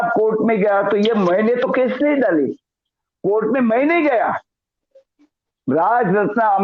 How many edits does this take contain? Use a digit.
0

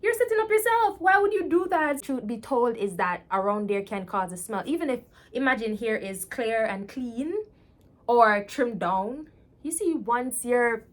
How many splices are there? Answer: 1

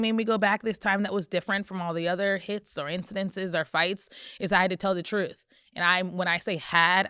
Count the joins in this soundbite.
0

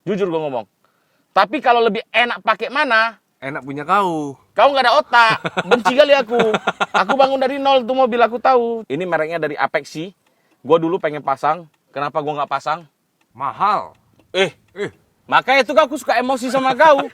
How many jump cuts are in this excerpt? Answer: 1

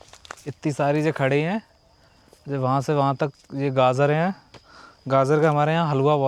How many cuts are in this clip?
0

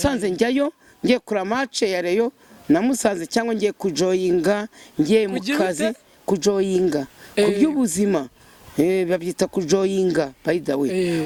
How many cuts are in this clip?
0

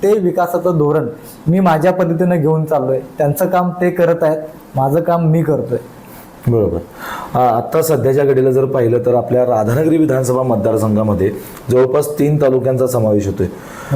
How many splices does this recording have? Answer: 0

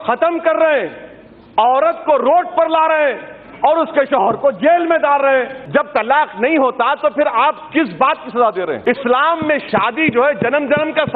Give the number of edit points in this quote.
2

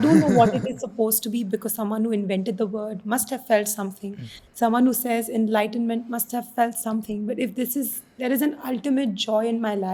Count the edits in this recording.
0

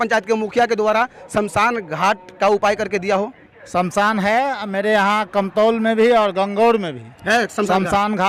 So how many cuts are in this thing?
0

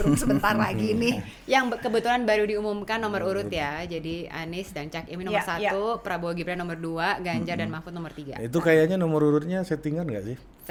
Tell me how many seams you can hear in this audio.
0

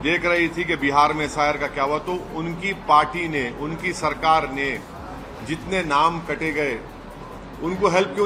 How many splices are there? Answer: 0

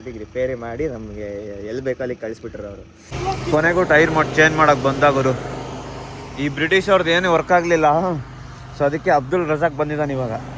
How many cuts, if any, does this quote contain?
1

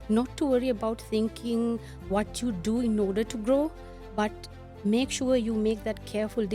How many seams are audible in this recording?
0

